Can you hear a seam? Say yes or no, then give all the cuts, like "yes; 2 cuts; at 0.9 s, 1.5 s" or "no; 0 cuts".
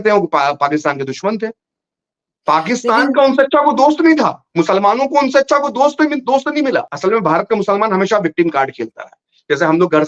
yes; 1 cut; at 6.9 s